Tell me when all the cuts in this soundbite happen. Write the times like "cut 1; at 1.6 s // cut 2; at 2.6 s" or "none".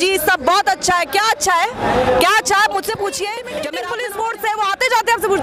cut 1; at 3.8 s